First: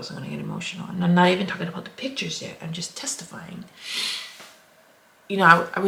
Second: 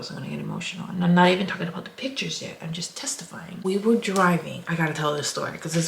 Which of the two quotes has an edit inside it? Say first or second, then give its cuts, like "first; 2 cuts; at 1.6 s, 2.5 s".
second; 1 cut; at 3.5 s